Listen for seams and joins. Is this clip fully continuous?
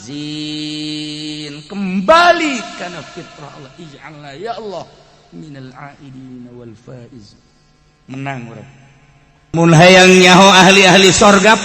no; 1 cut; at 9.5 s

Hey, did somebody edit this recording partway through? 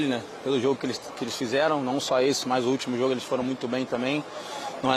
no; 0 cuts

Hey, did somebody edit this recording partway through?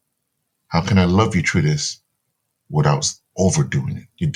no; 0 cuts

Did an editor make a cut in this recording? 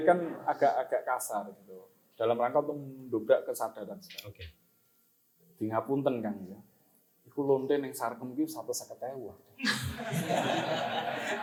no; 0 cuts

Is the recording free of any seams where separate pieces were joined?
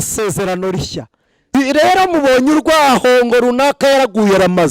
no; 1 cut; at 1.5 s

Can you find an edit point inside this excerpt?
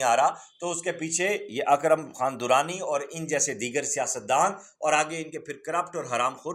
no; 0 cuts

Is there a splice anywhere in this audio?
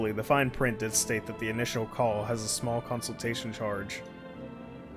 no; 0 cuts

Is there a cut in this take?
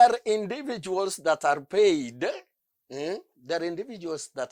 no; 0 cuts

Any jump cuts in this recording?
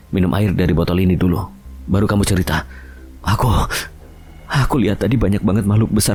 no; 0 cuts

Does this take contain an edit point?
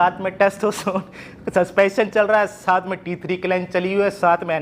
no; 0 cuts

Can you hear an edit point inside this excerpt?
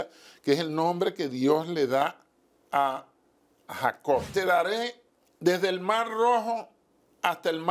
yes; 1 cut; at 4.3 s

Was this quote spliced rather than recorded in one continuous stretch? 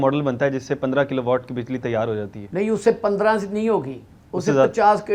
no; 0 cuts

